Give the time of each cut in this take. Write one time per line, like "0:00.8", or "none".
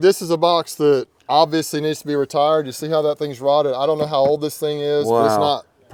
none